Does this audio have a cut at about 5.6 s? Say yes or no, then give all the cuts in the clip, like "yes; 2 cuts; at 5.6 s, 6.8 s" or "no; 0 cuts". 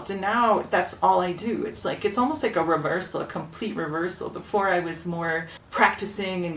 yes; 1 cut; at 5.6 s